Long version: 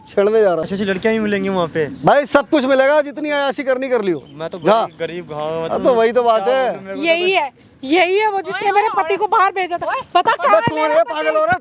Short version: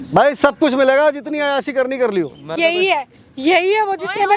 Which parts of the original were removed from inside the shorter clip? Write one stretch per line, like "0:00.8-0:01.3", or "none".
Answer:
0:04.4-0:06.9